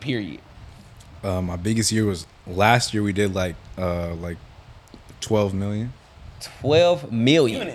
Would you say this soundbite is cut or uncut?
uncut